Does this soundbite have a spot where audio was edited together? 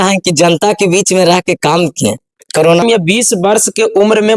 yes; 1 cut; at 2.8 s

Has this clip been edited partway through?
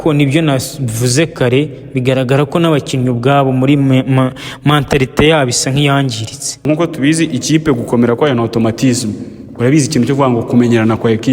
yes; 1 cut; at 6.6 s

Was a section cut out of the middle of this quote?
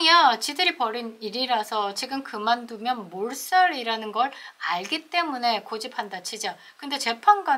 no; 0 cuts

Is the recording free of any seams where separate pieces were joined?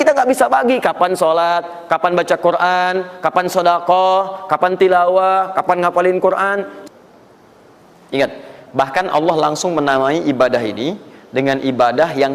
no; 1 cut; at 6.7 s

